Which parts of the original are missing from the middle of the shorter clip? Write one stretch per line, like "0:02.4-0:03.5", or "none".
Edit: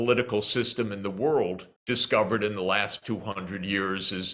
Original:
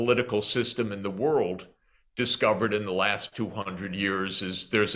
0:01.7-0:02.0